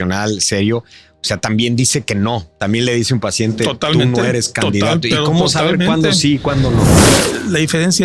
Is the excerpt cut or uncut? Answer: cut